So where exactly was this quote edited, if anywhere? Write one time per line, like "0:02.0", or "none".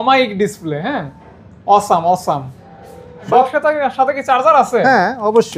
0:03.3